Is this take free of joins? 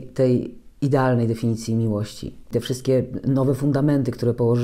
no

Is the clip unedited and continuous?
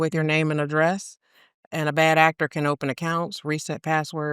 yes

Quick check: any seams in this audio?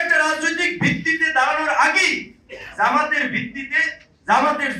no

